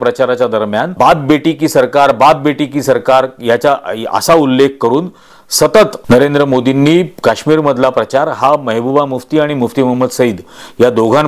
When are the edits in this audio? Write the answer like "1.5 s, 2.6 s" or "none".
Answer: 0.9 s, 6.0 s

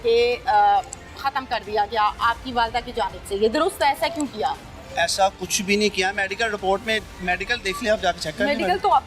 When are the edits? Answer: none

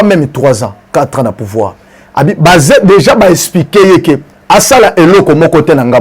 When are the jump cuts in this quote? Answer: none

